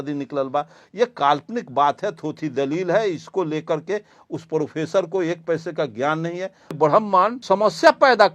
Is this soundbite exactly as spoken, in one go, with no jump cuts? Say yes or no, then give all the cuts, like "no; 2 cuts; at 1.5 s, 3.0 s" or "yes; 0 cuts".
no; 2 cuts; at 6.8 s, 7.4 s